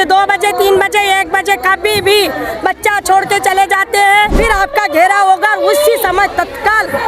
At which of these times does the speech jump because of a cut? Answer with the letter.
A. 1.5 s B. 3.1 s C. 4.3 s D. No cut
C